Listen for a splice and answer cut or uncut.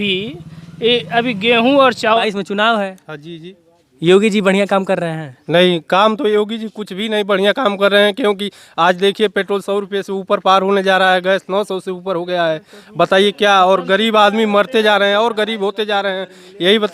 cut